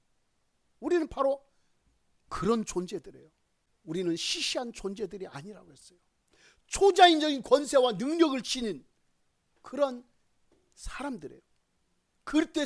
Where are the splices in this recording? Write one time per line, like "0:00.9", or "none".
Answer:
0:03.7

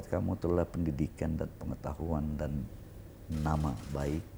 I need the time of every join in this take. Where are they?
none

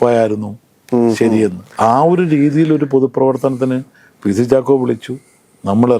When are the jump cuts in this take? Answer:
0:01.6

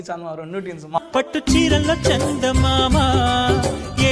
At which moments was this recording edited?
0:01.0

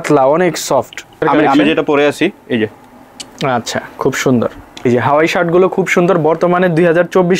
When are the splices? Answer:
0:01.2
0:04.8

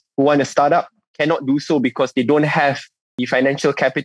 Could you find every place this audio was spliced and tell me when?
0:03.1

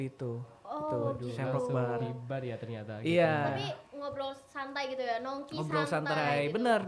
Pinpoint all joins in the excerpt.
none

